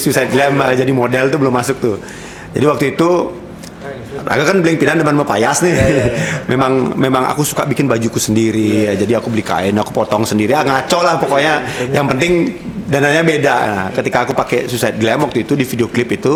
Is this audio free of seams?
yes; 0 cuts

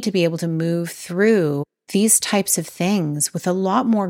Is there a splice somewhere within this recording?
yes; 1 cut; at 1.7 s

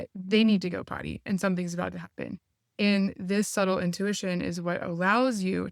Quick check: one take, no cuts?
yes; 0 cuts

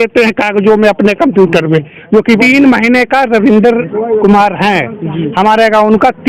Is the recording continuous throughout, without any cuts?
no; 1 cut; at 2.4 s

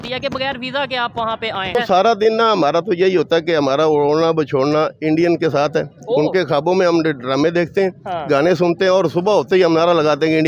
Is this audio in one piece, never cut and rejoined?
no; 1 cut; at 1.8 s

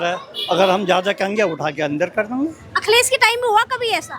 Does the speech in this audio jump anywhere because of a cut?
no; 0 cuts

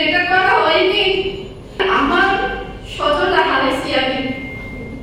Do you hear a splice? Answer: yes; 1 cut; at 1.8 s

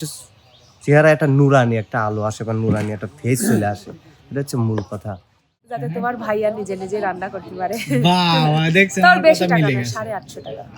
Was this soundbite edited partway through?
yes; 1 cut; at 5.8 s

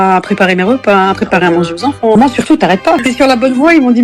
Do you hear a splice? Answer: yes; 2 cuts; at 2.1 s, 3.0 s

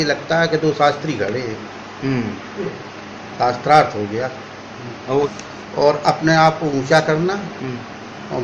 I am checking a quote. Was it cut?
yes; 1 cut; at 5.3 s

